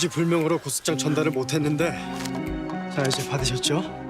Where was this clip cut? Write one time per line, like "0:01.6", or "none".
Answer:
0:02.1